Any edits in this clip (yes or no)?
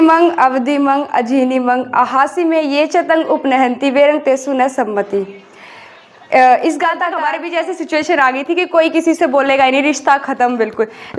yes